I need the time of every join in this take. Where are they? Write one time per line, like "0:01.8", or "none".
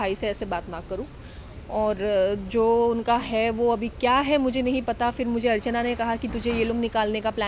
none